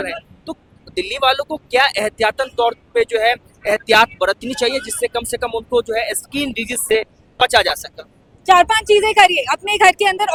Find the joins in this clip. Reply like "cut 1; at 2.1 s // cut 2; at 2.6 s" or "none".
none